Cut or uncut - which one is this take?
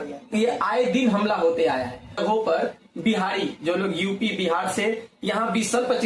cut